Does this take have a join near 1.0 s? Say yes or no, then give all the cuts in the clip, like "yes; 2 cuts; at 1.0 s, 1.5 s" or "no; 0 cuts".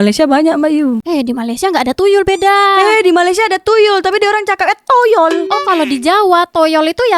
yes; 1 cut; at 1.0 s